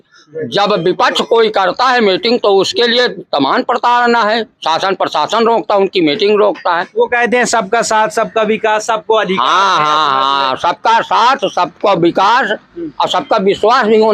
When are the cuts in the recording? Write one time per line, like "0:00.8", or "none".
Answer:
none

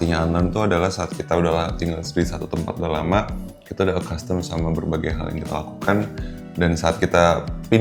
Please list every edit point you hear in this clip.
none

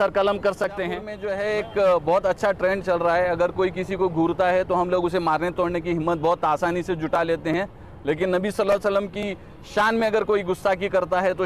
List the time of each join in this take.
0:01.2

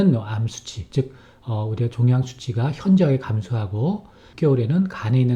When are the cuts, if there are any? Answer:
0:04.2

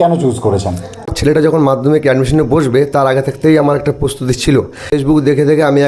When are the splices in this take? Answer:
0:01.2
0:04.9

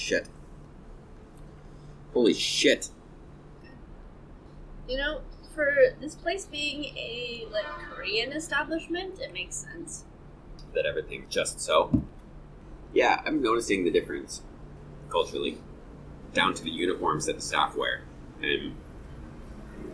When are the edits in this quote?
0:03.6

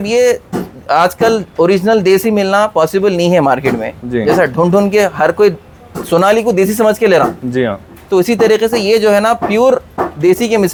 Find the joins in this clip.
none

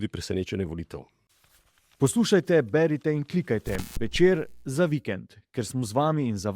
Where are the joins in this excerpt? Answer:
0:01.4

